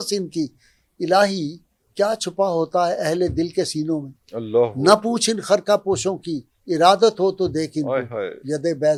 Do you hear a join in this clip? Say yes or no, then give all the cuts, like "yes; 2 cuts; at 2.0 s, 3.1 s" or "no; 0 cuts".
no; 0 cuts